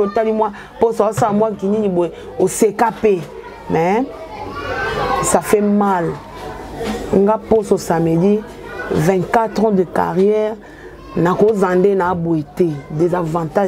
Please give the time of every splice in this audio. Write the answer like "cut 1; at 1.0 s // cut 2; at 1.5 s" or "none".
none